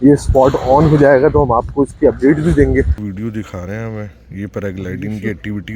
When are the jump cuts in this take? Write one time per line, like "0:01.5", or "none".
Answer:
0:02.9